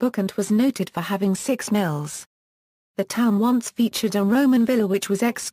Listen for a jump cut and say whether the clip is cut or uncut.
uncut